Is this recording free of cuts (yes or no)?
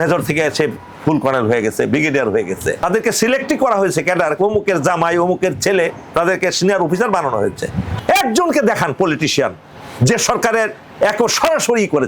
no